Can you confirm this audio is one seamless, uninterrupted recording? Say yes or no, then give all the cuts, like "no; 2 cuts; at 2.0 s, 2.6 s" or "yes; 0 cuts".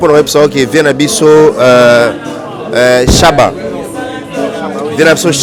yes; 0 cuts